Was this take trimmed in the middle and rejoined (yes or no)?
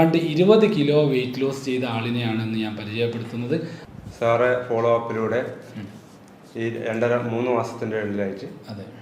yes